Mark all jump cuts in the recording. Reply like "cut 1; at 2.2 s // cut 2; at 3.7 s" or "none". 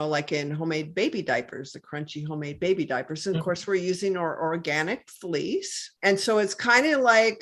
cut 1; at 5.9 s